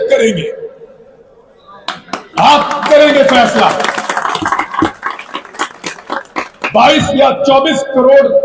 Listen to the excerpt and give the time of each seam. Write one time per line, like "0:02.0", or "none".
none